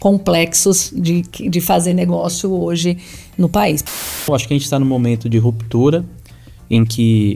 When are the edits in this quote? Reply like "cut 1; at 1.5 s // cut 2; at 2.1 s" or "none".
cut 1; at 4.0 s